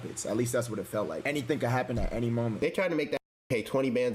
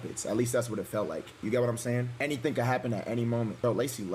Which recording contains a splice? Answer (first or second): first